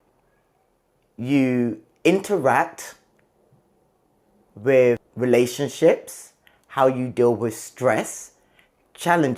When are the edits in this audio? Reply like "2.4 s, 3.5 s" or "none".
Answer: 5.1 s